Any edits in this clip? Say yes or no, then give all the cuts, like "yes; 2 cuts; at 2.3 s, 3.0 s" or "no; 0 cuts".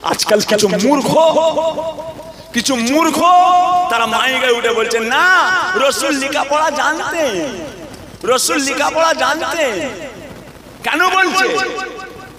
no; 0 cuts